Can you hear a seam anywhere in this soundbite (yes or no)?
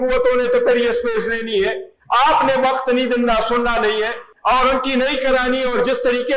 yes